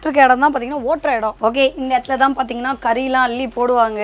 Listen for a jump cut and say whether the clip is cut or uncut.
uncut